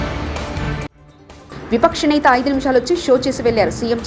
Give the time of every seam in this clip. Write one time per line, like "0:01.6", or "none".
none